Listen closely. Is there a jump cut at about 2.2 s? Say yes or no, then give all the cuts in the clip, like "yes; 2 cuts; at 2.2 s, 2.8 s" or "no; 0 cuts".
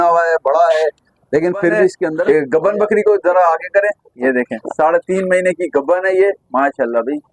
yes; 1 cut; at 2.2 s